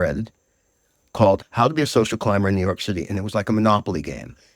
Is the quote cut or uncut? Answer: cut